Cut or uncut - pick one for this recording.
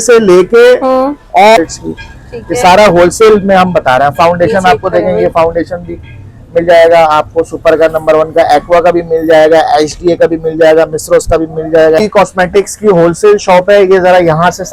cut